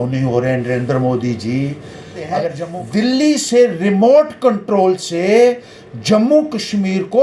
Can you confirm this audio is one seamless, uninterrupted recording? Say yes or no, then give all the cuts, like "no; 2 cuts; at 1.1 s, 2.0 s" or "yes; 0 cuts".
no; 1 cut; at 2.6 s